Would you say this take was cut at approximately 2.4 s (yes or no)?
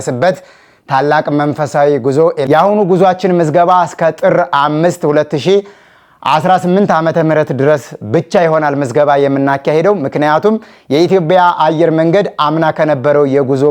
yes